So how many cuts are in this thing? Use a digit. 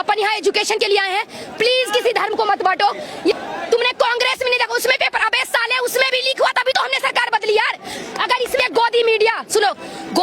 2